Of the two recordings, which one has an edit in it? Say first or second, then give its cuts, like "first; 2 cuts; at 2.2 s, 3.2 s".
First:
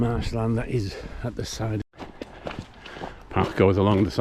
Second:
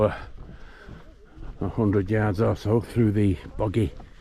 first; 1 cut; at 1.9 s